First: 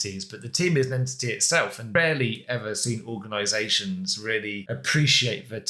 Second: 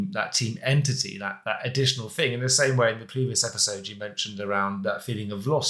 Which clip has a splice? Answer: first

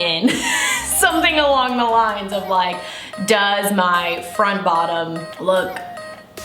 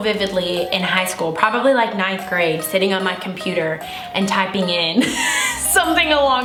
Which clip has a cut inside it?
first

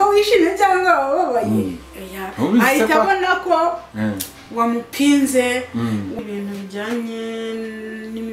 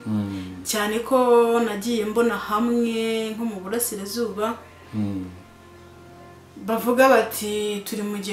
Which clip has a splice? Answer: first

